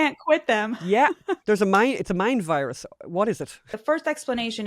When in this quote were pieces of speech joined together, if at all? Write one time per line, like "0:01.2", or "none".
0:01.4
0:03.8